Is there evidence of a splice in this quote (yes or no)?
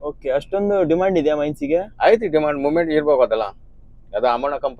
no